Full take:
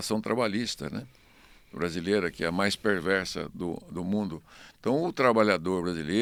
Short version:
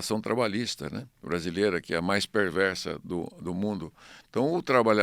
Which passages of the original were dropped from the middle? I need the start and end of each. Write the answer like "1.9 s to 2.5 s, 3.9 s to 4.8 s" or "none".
1.1 s to 1.6 s